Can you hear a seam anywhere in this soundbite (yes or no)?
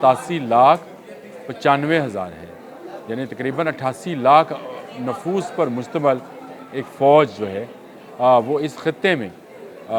no